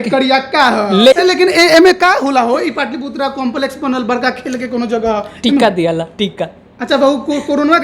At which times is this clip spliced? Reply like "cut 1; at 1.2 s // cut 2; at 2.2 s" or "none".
cut 1; at 1.2 s